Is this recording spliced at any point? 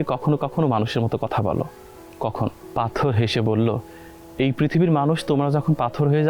yes; 1 cut; at 2.6 s

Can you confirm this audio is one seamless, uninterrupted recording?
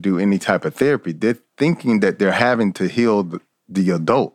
yes; 0 cuts

